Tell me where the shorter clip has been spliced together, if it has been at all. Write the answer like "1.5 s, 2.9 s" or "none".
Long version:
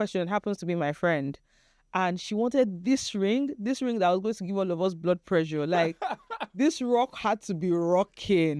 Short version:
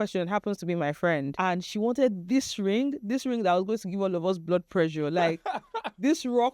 1.3 s